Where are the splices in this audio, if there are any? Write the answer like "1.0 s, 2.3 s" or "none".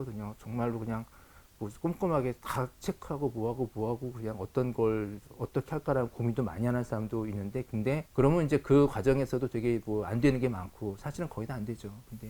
8.1 s